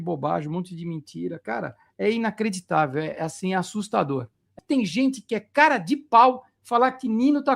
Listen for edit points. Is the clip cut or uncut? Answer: cut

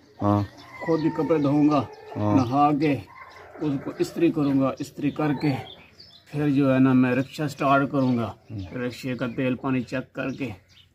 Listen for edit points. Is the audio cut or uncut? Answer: uncut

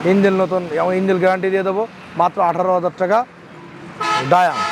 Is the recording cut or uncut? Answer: uncut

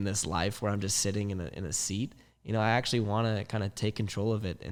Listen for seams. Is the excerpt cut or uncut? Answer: uncut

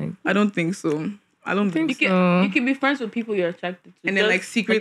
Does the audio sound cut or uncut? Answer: uncut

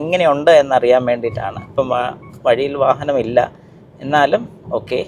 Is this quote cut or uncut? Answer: uncut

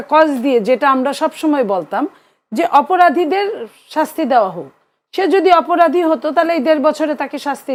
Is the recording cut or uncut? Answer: uncut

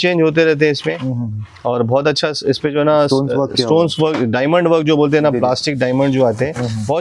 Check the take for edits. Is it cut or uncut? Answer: uncut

